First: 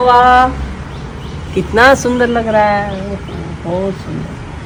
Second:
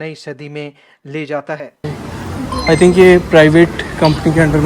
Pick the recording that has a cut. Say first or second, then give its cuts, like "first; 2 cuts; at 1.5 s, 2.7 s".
second; 1 cut; at 1.9 s